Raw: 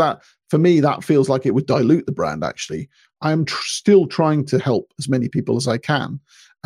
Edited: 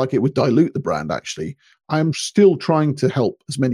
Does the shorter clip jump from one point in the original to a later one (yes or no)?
yes